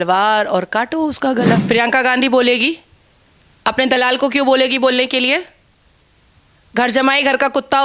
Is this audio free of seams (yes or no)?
no